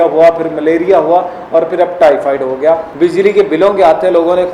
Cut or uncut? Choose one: cut